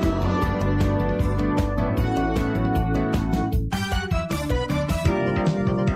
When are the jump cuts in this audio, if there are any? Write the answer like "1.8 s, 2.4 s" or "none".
5.0 s